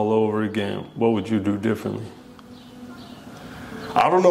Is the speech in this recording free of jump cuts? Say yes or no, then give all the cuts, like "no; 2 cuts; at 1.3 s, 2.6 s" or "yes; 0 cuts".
yes; 0 cuts